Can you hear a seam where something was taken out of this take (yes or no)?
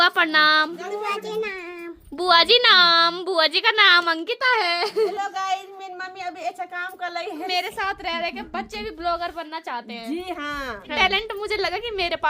yes